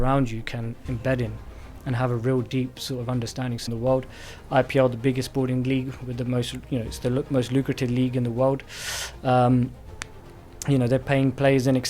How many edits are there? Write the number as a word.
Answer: one